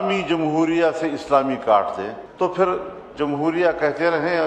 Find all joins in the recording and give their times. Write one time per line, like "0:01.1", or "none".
0:02.2

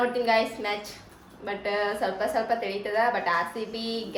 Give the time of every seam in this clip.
none

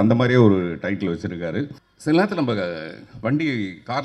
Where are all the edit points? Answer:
0:01.8

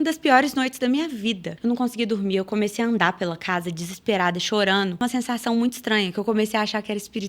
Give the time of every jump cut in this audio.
0:01.5
0:05.0

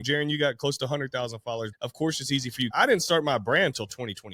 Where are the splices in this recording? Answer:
0:01.7
0:02.7

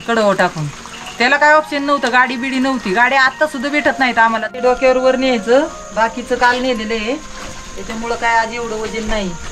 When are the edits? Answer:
0:04.5

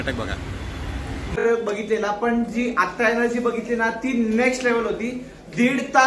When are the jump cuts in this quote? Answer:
0:01.4

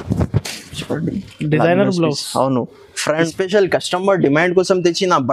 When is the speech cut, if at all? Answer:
0:03.3

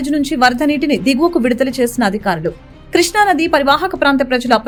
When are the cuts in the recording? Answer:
none

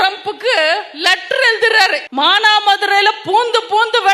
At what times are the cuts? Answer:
0:02.1

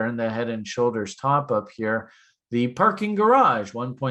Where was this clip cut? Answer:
none

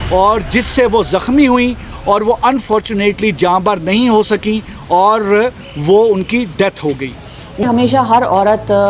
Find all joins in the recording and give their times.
0:07.6

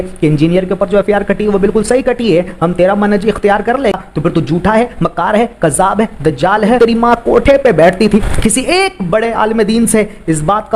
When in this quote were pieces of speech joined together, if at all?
0:04.0
0:06.8
0:08.3

